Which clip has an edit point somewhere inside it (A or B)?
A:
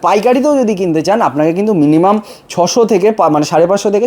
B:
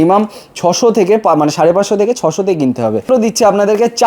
B